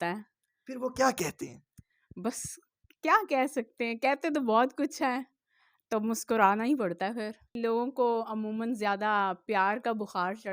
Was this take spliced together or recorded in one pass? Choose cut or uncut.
cut